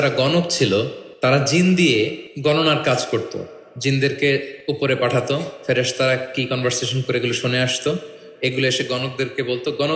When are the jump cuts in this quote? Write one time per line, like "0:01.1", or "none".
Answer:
0:01.0
0:02.2
0:04.5